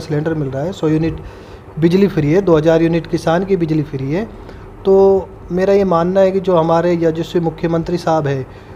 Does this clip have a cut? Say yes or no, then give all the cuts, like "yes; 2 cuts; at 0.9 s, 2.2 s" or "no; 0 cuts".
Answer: no; 0 cuts